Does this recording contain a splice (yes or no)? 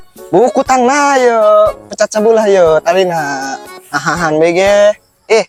no